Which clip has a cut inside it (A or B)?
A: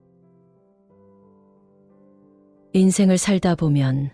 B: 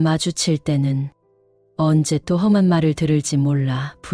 A